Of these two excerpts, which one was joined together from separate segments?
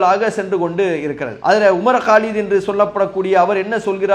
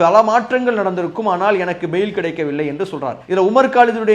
first; 1 cut; at 1.3 s

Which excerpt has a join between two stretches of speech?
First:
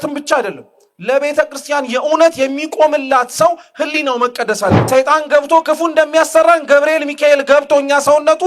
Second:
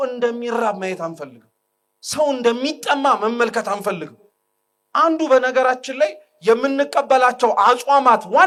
first; 1 cut; at 4.8 s

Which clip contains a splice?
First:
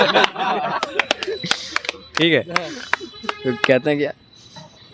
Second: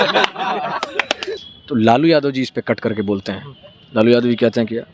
second; 1 cut; at 1.5 s

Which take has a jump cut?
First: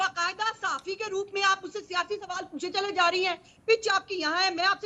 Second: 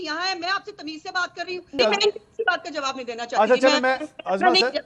second; 1 cut; at 1.8 s

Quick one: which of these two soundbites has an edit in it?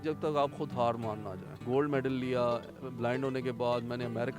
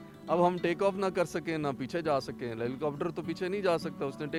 first; 1 cut; at 1.6 s

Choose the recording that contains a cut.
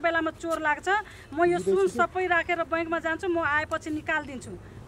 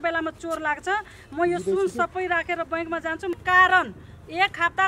second; 1 cut; at 3.3 s

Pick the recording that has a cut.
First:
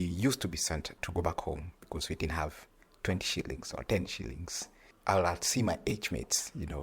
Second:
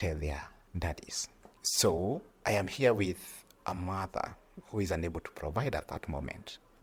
first; 1 cut; at 1.0 s

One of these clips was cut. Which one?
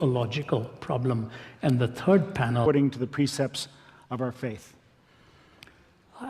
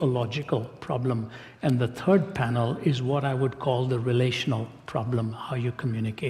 second; 1 cut; at 2.6 s

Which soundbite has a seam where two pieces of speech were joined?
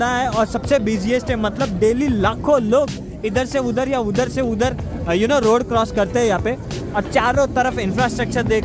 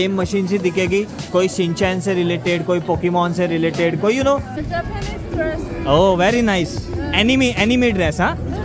second; 1 cut; at 4.5 s

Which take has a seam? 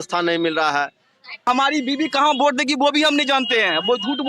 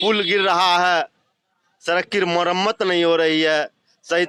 first; 1 cut; at 1.5 s

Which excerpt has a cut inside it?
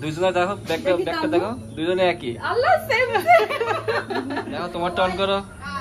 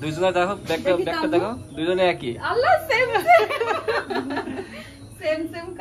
first; 1 cut; at 4.7 s

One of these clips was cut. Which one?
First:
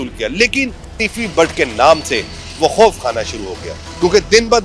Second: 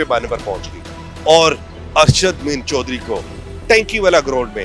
first; 1 cut; at 1.0 s

